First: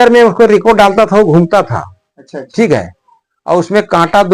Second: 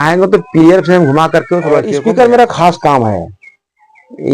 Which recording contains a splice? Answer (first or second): second